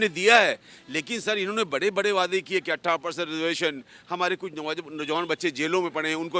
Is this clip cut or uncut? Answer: uncut